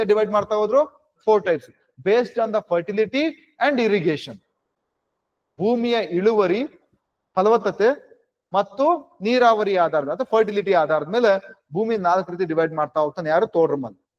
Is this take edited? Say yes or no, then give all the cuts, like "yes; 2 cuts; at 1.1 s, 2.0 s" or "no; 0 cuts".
no; 0 cuts